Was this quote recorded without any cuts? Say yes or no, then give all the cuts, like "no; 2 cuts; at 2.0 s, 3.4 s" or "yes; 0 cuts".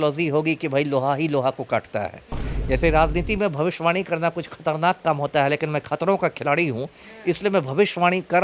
no; 1 cut; at 2.8 s